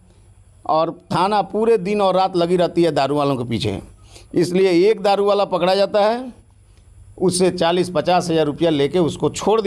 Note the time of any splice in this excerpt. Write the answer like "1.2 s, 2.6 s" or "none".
none